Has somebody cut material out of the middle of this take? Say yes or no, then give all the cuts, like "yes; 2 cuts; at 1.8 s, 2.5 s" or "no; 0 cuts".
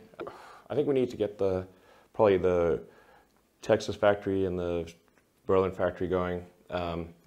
no; 0 cuts